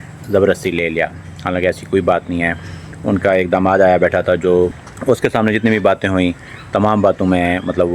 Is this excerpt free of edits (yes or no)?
no